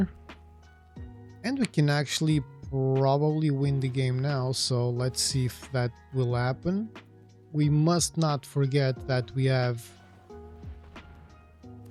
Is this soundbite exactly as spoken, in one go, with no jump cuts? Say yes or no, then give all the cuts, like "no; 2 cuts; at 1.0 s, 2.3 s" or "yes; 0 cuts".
yes; 0 cuts